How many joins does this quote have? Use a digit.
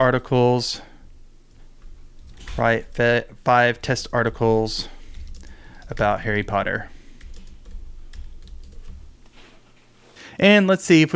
1